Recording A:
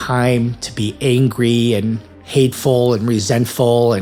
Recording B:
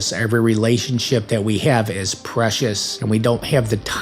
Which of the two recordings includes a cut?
B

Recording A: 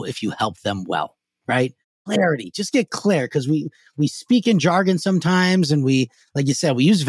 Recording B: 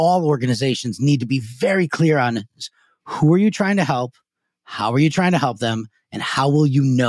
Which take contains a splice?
A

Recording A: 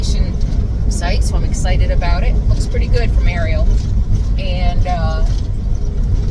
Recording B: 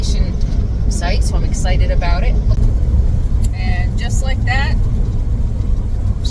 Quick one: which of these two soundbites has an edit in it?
B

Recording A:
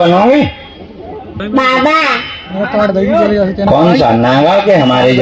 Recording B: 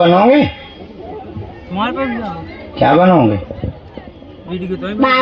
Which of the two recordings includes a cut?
A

